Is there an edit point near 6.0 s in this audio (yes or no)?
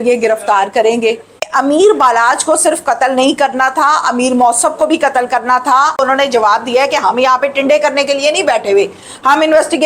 yes